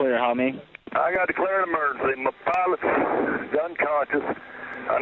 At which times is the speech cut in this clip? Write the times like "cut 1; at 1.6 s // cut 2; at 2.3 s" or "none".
none